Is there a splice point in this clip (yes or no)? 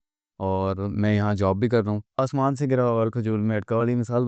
yes